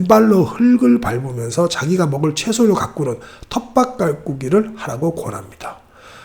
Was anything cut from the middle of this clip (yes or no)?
no